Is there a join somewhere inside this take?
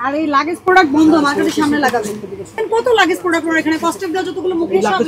yes; 1 cut; at 2.6 s

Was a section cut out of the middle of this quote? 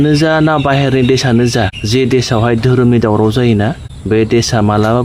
yes; 2 cuts; at 1.8 s, 3.9 s

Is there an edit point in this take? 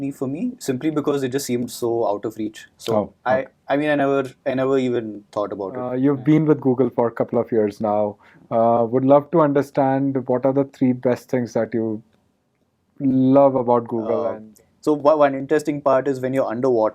yes; 2 cuts; at 5.9 s, 14.3 s

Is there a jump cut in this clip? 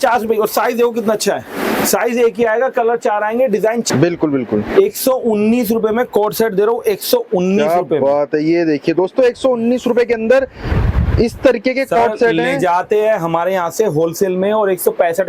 yes; 1 cut; at 3.9 s

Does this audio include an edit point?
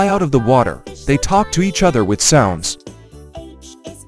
yes; 1 cut; at 2.7 s

